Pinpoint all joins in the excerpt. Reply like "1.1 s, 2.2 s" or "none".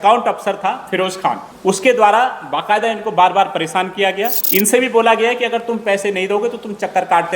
1.5 s, 4.4 s